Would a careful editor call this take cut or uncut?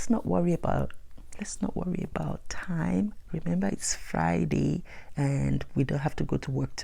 uncut